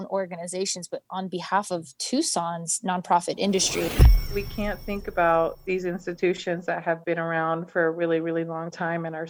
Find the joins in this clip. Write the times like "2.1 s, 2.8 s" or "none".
4.0 s